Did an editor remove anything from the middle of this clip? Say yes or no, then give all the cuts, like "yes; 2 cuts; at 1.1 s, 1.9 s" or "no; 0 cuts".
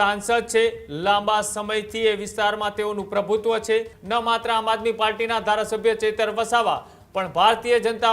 yes; 1 cut; at 4.0 s